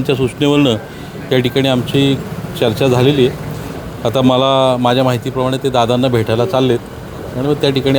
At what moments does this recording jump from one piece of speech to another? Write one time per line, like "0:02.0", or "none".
none